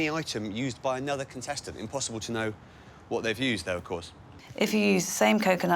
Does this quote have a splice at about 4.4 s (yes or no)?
yes